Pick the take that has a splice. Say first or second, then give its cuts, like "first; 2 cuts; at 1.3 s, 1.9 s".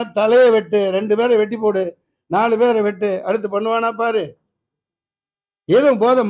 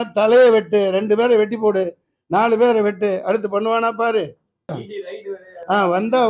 second; 1 cut; at 4.8 s